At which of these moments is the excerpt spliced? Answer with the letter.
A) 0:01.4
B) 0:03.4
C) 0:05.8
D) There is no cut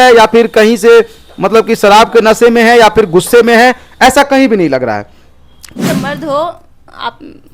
C